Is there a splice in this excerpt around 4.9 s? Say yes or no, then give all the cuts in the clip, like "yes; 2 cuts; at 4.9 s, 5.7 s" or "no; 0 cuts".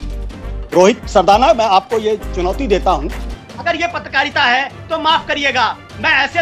no; 1 cut; at 3.2 s